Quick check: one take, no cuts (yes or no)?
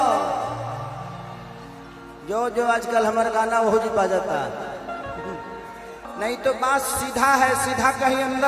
no